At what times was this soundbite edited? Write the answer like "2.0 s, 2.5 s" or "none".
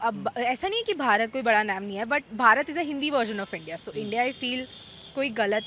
none